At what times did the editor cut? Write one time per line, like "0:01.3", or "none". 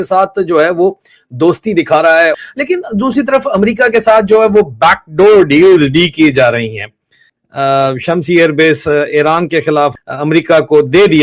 0:02.3
0:10.0

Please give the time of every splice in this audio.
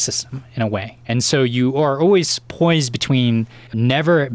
0:00.9

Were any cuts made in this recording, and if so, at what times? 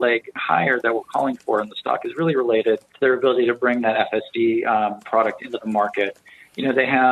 0:02.9

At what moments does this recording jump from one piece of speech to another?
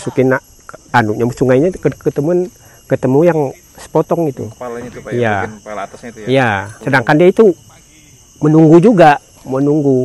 0:06.7

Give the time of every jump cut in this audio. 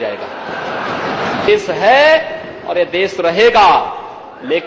0:01.5

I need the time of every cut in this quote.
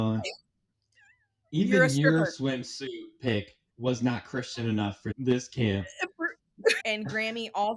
0:05.1
0:06.8

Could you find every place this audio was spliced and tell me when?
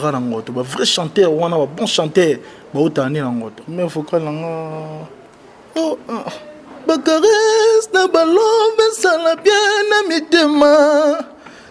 0:03.6

